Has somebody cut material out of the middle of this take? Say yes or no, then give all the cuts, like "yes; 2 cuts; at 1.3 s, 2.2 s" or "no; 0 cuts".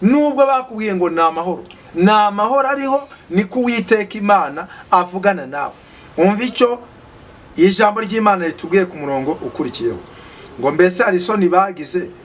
no; 0 cuts